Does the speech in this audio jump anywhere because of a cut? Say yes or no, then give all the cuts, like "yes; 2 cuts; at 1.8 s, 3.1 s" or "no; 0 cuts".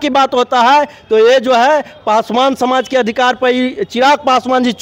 no; 0 cuts